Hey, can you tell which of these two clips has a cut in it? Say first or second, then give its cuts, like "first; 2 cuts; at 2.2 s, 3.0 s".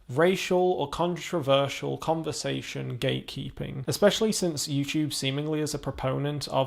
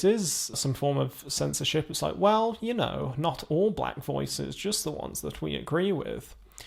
first; 1 cut; at 3.8 s